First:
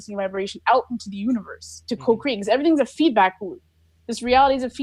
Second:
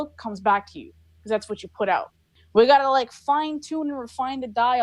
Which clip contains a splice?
second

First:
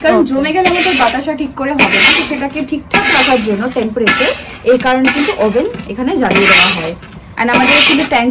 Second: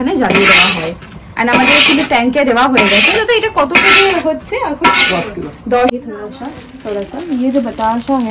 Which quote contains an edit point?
second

